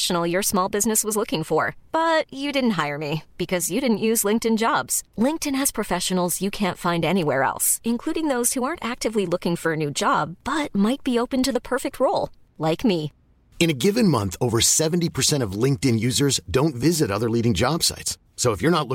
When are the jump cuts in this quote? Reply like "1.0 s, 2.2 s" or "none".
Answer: none